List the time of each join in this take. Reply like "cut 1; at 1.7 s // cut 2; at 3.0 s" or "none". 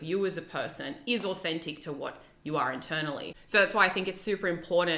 cut 1; at 3.4 s